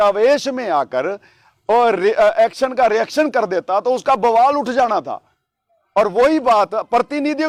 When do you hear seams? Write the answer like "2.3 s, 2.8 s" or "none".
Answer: none

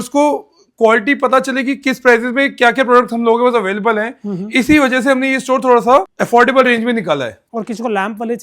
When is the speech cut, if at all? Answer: 6.1 s, 7.4 s

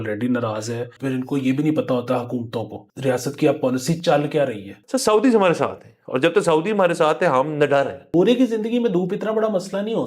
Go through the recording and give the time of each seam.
0.9 s, 2.8 s, 4.8 s, 8.1 s

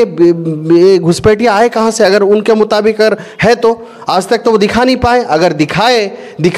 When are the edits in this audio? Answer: none

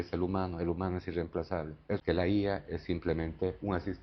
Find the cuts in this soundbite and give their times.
2.0 s

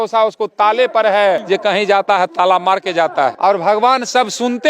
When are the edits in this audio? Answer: 1.4 s, 3.4 s

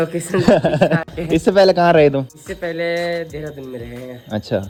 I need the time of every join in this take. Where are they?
none

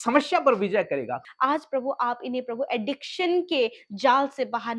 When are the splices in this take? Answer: 1.2 s

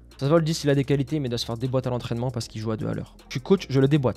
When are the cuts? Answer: 3.2 s

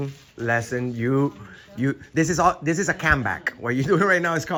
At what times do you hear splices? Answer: none

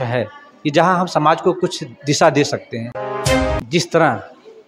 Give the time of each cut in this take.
3.1 s

